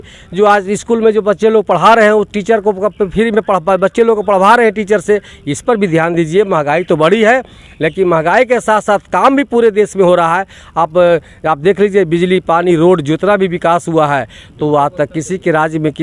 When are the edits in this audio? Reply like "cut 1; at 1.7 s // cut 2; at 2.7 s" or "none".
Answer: none

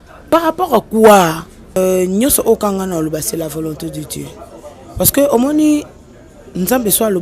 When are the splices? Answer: cut 1; at 1.8 s

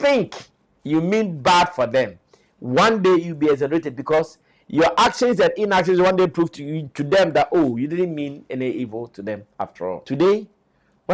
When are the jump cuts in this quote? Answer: cut 1; at 10.0 s

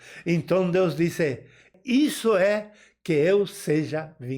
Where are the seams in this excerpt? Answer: cut 1; at 1.7 s

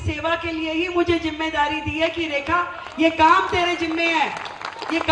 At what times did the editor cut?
none

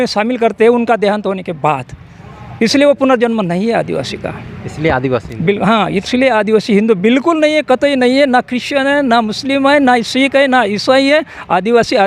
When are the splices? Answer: none

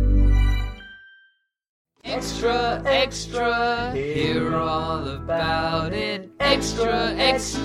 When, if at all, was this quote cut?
cut 1; at 1.9 s

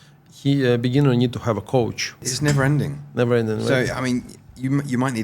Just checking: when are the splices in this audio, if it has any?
cut 1; at 2.1 s

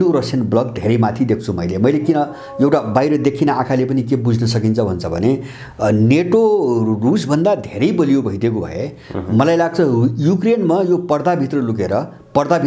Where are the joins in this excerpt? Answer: none

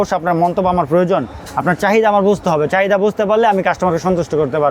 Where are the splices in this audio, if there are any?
none

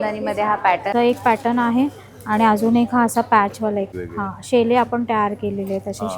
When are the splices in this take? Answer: cut 1; at 0.9 s // cut 2; at 4.0 s

